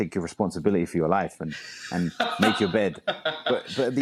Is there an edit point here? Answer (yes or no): no